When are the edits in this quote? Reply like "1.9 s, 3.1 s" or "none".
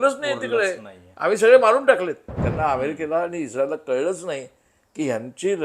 2.5 s